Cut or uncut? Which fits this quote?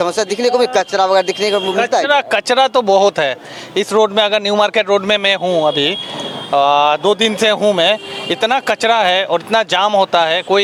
uncut